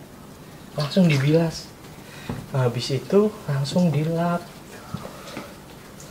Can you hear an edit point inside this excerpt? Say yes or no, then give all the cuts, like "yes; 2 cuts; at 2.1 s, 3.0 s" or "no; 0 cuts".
no; 0 cuts